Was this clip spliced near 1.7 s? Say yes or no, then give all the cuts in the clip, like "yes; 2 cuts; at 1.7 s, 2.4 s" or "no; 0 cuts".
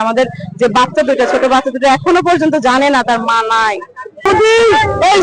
no; 1 cut; at 4.2 s